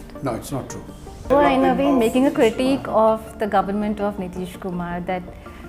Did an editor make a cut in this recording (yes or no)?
yes